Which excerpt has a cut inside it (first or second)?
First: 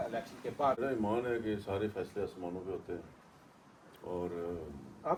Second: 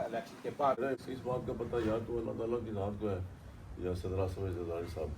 second